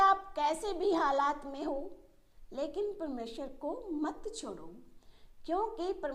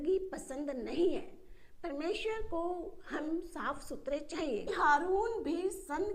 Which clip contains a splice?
second; 1 cut; at 4.7 s

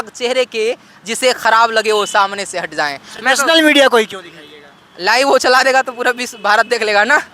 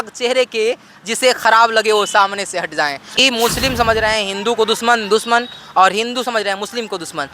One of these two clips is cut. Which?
second; 1 cut; at 3.0 s

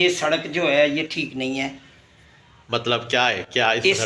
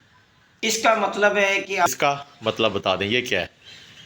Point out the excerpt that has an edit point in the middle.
second; 1 cut; at 1.9 s

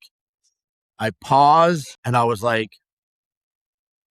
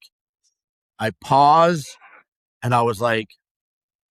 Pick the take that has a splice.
first; 1 cut; at 1.9 s

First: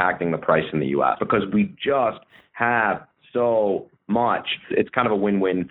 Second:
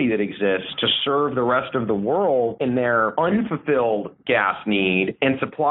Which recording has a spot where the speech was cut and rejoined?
first; 2 cuts; at 1.2 s, 4.7 s

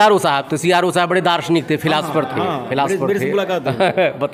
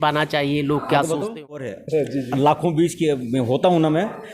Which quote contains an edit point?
second; 1 cut; at 1.8 s

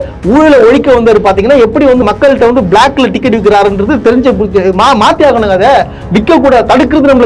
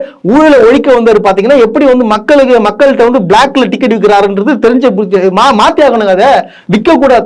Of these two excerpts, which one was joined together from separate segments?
first; 1 cut; at 2.0 s

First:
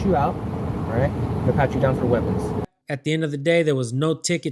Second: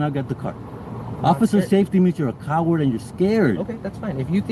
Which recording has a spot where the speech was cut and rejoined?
first; 1 cut; at 2.6 s

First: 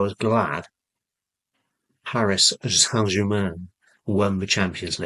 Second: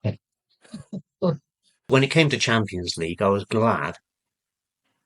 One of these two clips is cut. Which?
second; 1 cut; at 1.9 s

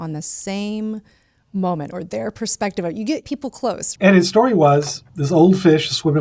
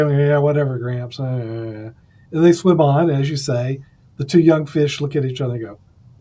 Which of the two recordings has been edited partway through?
first; 2 cuts; at 3.9 s, 5.0 s

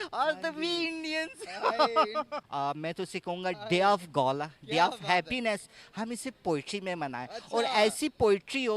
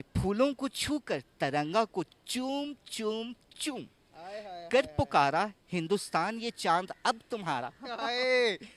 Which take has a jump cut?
first; 1 cut; at 2.4 s

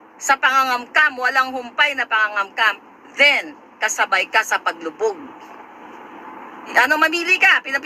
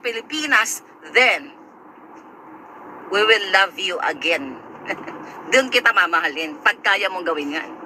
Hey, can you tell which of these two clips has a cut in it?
first; 1 cut; at 6.7 s

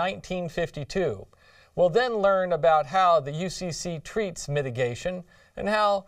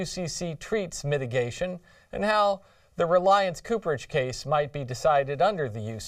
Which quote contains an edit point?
first; 1 cut; at 2.0 s

